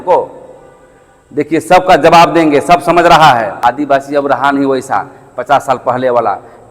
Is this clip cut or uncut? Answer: cut